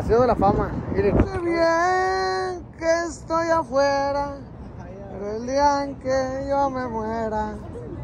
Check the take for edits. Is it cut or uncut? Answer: cut